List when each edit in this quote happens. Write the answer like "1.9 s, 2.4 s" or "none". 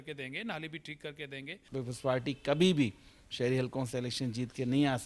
1.6 s